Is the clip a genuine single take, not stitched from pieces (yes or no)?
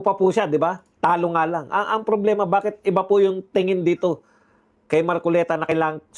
yes